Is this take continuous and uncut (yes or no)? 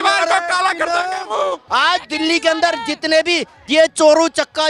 no